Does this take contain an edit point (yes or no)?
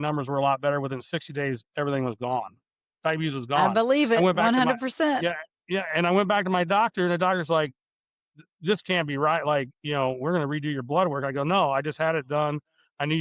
no